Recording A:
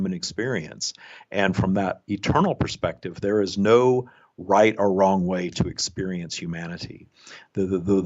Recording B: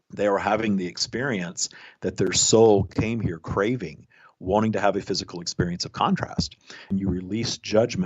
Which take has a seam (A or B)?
B